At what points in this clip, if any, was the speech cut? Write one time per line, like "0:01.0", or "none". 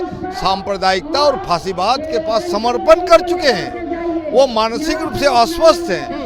none